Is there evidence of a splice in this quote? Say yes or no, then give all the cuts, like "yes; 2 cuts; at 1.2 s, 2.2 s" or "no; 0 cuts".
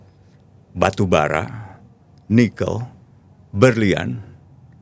no; 0 cuts